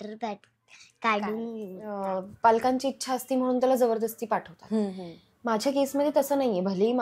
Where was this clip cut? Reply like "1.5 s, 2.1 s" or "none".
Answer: 1.8 s